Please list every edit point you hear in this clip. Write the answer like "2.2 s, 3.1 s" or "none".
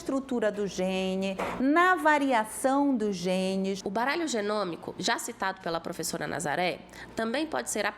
3.8 s